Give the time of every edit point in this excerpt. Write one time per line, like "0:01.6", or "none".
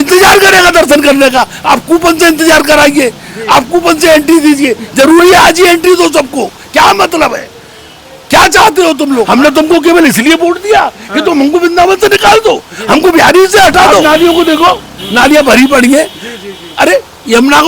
0:09.3
0:14.0